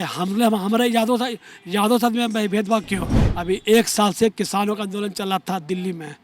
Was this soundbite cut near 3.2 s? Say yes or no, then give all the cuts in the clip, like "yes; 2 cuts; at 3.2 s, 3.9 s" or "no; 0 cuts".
yes; 1 cut; at 3.2 s